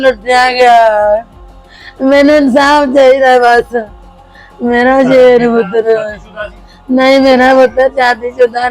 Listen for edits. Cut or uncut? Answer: uncut